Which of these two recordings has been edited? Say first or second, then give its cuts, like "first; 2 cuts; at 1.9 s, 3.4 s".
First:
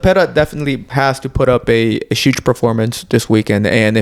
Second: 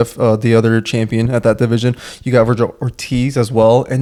first; 1 cut; at 0.9 s